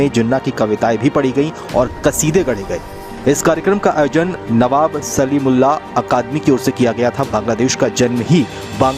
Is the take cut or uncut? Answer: uncut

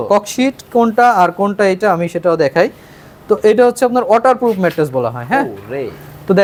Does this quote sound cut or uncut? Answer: uncut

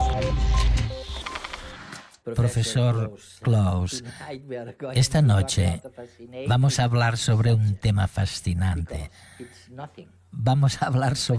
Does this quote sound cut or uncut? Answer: cut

